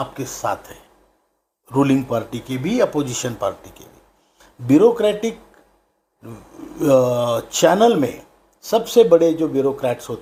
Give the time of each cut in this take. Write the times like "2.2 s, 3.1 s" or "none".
none